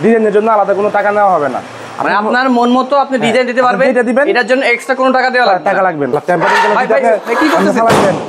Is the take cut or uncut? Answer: cut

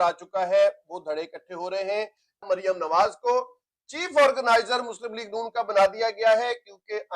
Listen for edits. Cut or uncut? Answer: cut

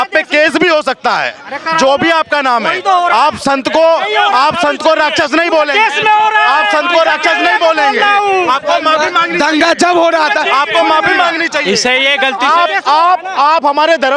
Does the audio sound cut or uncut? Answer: uncut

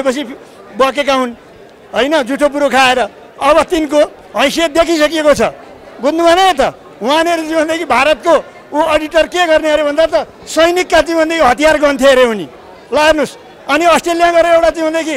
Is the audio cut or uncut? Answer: uncut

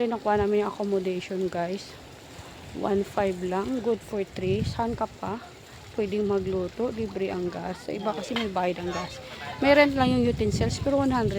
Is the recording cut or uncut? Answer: uncut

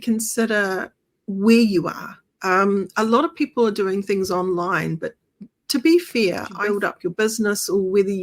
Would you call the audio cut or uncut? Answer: cut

